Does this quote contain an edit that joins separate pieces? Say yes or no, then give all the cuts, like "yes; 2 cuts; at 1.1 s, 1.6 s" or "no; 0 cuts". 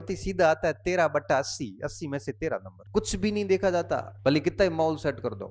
yes; 2 cuts; at 2.8 s, 4.1 s